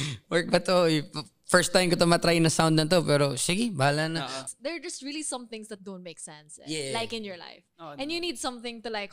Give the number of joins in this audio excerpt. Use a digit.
1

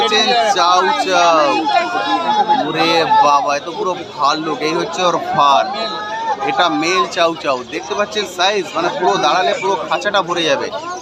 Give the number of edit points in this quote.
0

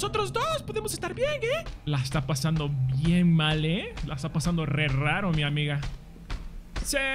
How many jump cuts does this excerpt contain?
1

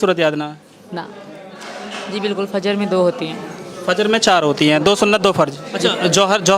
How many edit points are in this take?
2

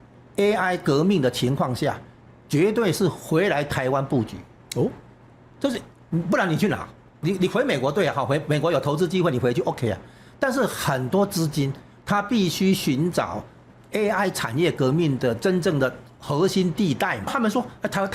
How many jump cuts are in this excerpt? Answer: 2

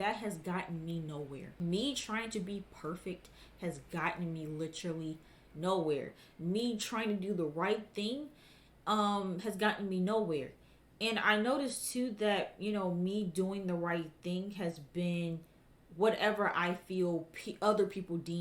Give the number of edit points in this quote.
0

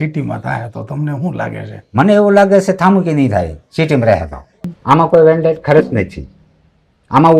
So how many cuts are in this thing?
1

